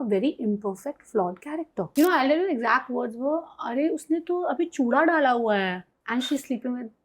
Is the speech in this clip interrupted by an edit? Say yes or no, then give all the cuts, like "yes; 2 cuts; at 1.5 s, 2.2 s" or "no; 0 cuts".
yes; 1 cut; at 1.8 s